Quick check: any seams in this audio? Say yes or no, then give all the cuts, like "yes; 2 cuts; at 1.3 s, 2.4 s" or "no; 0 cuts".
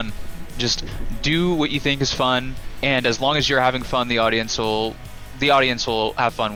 no; 0 cuts